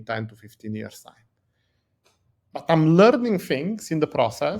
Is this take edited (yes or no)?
no